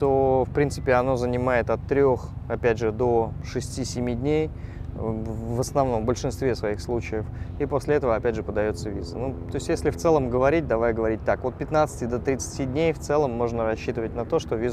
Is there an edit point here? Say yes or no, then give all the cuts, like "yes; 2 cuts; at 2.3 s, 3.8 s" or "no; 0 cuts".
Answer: no; 0 cuts